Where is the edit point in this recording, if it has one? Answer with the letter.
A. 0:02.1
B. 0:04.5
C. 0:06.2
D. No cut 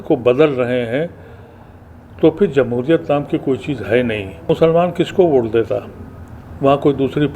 B